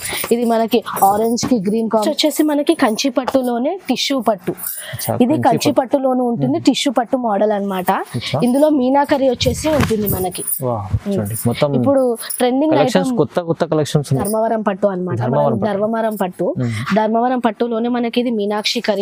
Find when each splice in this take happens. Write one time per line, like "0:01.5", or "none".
0:02.0
0:14.2